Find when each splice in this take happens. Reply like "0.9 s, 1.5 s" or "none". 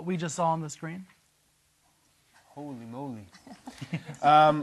3.5 s